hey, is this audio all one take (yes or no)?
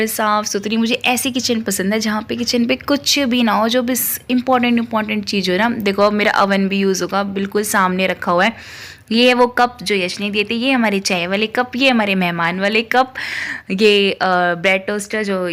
yes